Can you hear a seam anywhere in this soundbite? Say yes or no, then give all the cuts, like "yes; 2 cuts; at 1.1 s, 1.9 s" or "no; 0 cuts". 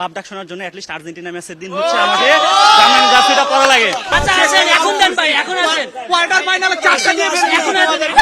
yes; 1 cut; at 4.1 s